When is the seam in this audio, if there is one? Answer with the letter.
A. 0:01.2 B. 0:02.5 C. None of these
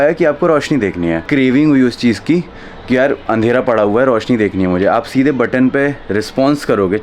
A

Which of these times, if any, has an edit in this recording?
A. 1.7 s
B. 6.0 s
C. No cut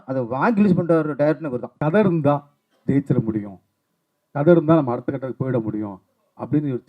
A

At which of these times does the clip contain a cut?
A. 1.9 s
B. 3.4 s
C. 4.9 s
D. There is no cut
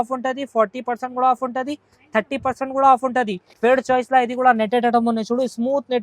B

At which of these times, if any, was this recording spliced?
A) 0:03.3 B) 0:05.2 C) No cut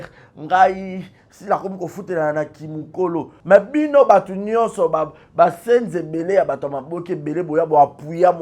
A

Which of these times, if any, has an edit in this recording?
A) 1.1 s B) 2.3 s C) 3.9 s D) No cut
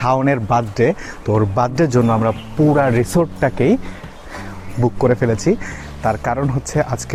D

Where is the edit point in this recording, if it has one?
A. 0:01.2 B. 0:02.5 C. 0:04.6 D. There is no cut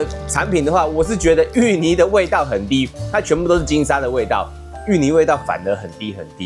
D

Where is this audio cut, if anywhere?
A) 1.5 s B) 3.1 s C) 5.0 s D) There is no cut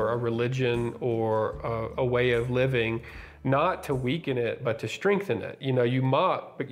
D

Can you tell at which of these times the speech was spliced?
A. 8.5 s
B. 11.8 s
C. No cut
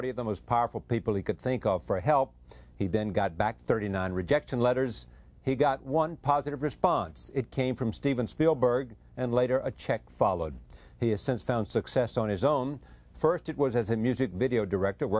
C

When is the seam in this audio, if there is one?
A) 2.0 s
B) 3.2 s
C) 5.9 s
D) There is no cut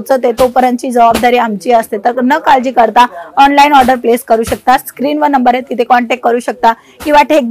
D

